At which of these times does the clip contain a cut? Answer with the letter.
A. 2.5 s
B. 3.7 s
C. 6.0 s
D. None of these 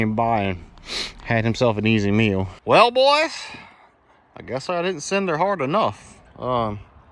A